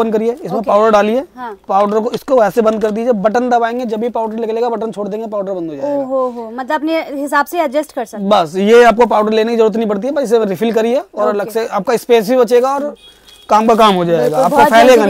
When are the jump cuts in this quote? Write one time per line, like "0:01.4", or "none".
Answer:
none